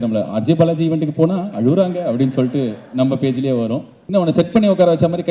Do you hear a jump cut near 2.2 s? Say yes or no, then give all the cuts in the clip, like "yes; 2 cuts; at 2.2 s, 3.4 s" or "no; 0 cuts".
no; 1 cut; at 3.9 s